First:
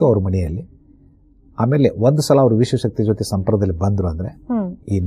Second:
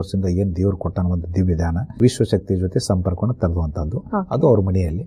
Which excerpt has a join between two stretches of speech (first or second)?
second